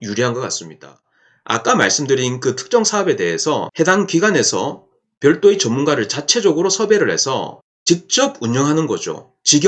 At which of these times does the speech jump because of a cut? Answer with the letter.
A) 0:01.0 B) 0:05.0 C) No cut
A